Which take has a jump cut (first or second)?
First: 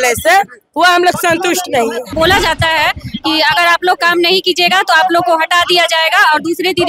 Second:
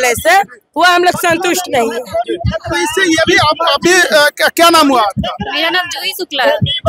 first